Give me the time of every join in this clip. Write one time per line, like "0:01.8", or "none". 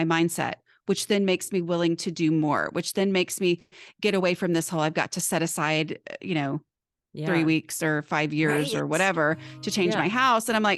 none

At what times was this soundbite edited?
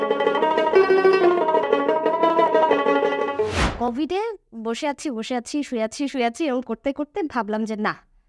0:03.3

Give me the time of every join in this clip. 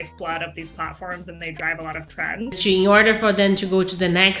0:02.6

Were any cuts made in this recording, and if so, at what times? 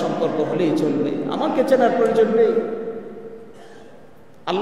none

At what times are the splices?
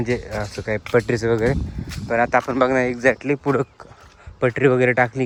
none

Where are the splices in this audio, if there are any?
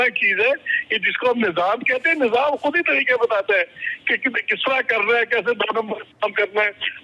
none

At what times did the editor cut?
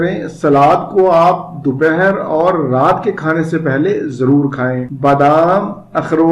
0:04.9

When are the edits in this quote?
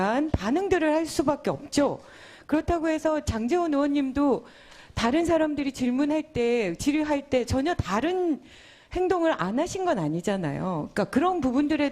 0:04.0

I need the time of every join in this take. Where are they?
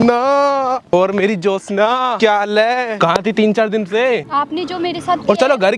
0:00.9
0:02.2
0:02.9
0:04.3

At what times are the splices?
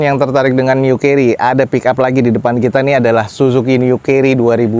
none

